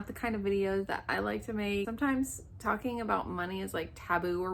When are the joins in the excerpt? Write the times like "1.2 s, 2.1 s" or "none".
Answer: 1.9 s